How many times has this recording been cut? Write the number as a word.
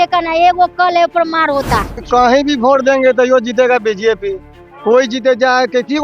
one